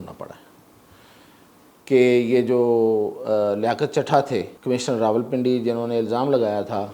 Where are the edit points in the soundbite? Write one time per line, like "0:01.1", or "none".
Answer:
0:01.8
0:04.5